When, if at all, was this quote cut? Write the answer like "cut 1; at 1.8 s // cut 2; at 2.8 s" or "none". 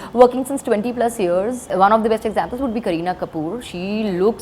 cut 1; at 1.7 s